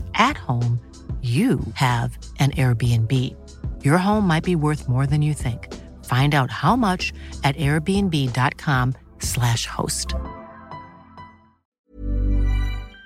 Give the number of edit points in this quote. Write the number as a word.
one